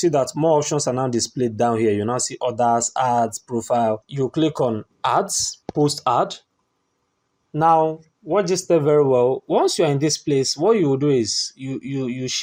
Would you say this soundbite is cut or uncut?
uncut